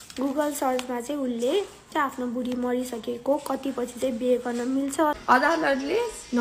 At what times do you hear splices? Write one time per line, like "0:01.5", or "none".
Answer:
0:01.8
0:05.2